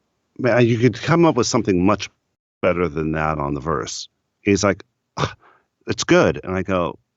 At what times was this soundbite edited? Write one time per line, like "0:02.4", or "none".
none